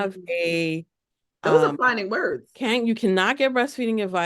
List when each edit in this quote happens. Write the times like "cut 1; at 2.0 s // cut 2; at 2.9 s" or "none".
cut 1; at 2.5 s